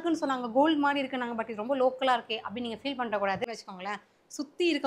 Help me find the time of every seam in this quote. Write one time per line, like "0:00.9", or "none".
0:03.4